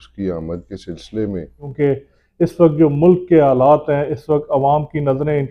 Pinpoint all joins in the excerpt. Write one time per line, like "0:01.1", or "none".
0:01.6